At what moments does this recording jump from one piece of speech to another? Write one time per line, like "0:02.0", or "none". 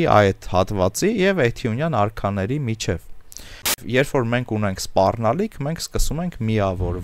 0:03.8